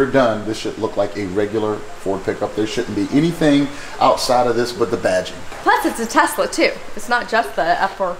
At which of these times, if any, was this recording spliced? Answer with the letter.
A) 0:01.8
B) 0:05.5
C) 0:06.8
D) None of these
B